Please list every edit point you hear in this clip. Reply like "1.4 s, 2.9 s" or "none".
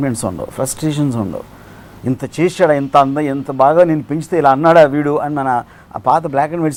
none